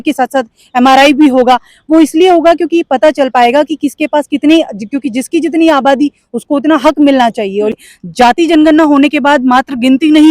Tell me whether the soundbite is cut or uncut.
cut